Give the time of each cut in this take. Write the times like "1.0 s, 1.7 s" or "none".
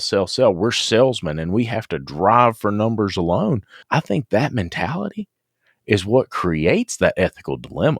3.7 s